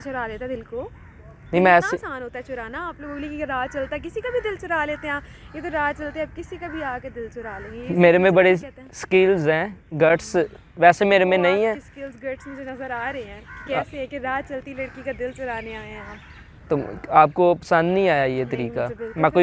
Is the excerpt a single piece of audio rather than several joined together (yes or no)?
yes